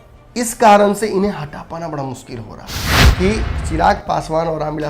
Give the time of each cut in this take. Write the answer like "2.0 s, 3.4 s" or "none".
2.9 s